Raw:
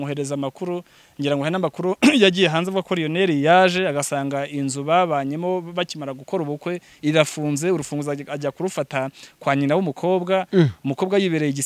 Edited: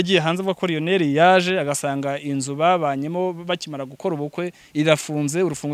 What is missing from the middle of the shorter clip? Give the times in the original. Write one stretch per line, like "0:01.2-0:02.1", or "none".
none